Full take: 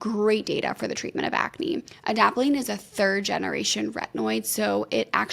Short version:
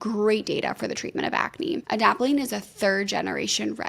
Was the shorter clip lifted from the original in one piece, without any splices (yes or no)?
no